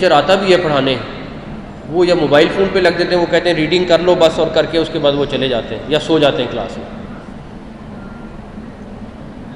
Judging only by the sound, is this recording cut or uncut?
uncut